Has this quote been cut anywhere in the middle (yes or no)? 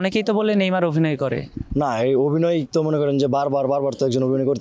no